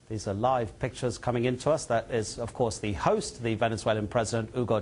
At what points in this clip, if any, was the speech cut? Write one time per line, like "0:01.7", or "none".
0:01.6